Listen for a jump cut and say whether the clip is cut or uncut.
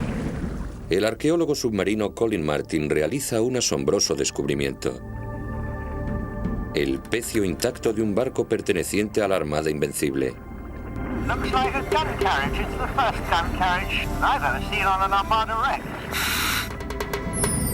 uncut